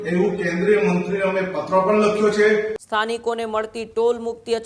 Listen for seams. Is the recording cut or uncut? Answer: cut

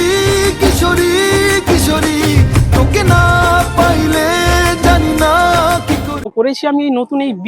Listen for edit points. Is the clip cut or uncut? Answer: cut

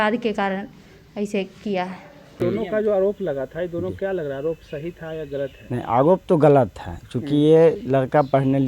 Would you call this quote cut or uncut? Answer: cut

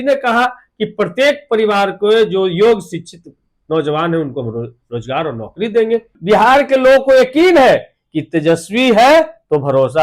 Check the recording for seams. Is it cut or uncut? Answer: cut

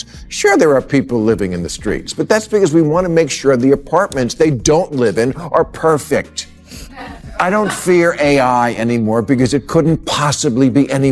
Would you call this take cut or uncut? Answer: uncut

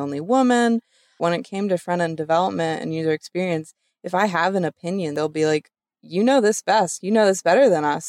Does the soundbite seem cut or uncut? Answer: cut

